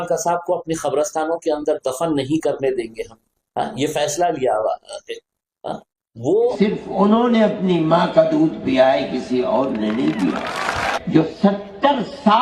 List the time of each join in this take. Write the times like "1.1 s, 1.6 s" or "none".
6.5 s, 10.9 s